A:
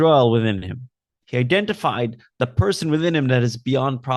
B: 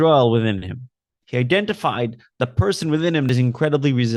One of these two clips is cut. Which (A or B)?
B